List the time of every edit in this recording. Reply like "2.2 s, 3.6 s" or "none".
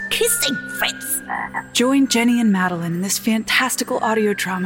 1.6 s

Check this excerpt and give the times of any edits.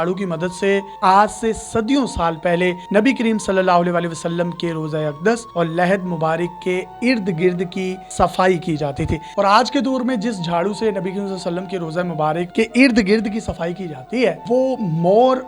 0.9 s, 9.3 s, 12.5 s, 14.4 s

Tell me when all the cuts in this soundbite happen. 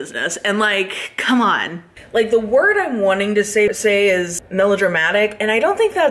1.9 s, 3.7 s

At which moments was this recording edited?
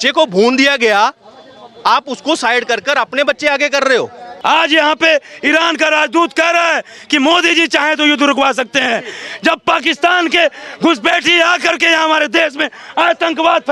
4.2 s

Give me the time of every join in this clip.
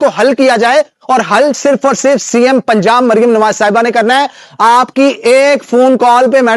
none

